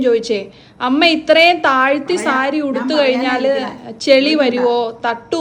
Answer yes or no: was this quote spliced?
no